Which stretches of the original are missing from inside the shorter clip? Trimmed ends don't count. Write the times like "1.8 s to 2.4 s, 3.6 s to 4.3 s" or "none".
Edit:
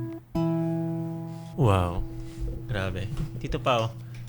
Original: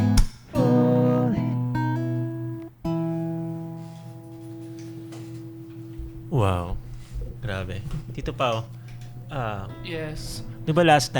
3.9 s to 6.2 s